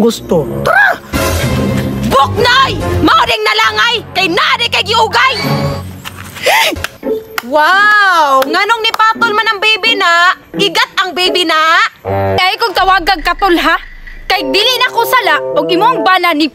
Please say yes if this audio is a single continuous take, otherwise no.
no